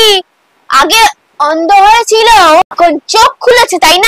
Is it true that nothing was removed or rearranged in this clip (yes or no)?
yes